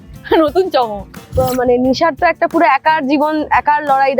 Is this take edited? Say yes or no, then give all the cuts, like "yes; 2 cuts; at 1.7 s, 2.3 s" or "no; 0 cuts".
yes; 1 cut; at 1.3 s